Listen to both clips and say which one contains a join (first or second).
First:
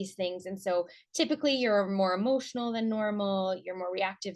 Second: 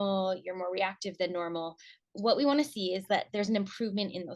second